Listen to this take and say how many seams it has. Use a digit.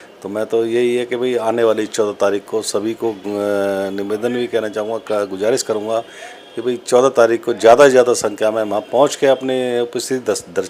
0